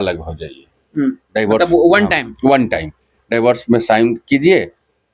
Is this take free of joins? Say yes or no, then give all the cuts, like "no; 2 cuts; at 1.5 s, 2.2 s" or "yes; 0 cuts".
yes; 0 cuts